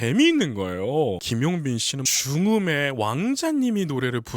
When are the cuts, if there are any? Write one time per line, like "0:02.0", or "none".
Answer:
0:01.2